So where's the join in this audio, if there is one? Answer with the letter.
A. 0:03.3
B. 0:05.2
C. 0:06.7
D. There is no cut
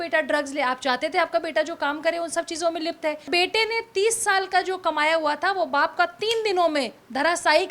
A